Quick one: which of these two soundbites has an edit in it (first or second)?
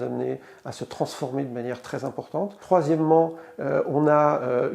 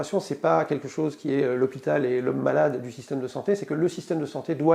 first